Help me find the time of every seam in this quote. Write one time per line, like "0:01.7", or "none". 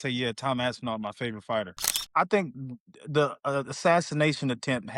0:01.8